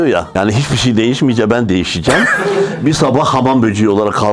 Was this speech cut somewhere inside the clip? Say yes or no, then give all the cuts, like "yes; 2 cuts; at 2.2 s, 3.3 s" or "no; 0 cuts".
no; 0 cuts